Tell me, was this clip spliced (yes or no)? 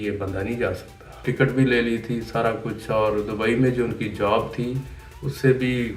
yes